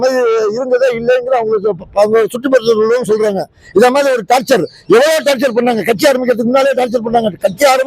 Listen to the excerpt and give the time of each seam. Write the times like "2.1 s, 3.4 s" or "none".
none